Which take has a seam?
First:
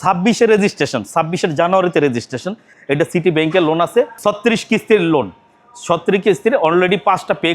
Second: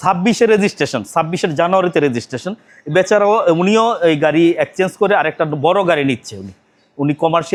first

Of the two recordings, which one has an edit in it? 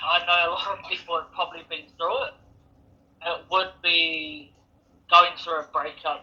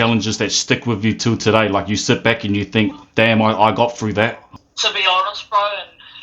second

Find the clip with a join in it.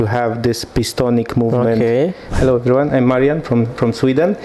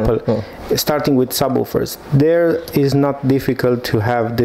first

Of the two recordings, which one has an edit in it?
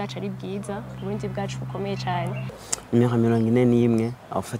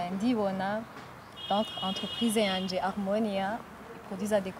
first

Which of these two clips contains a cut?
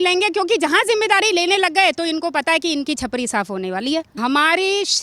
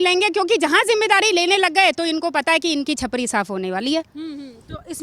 first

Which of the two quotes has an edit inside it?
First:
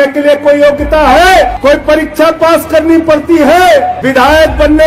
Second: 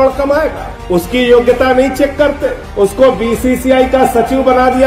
first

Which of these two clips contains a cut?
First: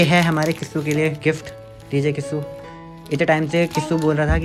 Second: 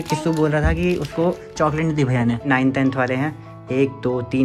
second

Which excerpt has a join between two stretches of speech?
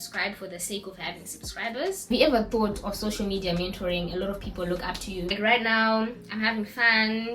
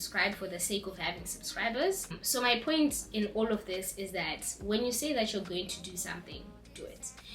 first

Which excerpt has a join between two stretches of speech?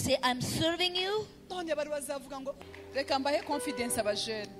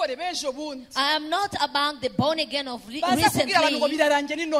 first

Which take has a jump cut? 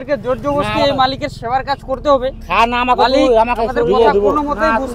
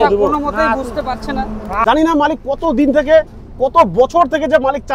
second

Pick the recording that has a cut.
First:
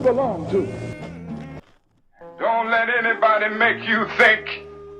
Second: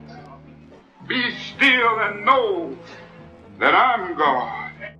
first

